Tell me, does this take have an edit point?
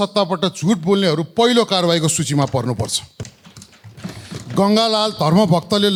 no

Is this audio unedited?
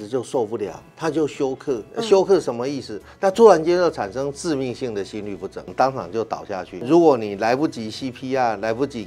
no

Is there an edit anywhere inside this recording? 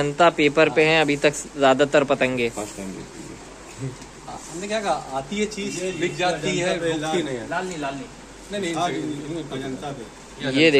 no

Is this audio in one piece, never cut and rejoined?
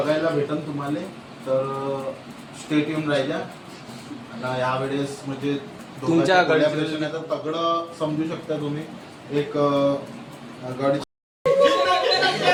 yes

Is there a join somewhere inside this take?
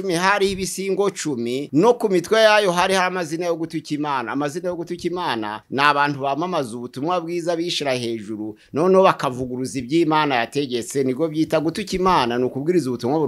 no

